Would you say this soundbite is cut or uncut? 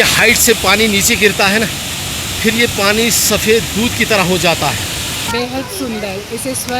cut